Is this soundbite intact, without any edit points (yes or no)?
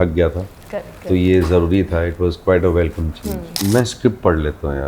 no